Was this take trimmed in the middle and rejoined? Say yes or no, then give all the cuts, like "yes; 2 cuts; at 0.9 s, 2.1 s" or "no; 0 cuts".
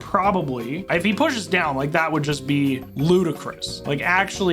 yes; 2 cuts; at 0.8 s, 2.9 s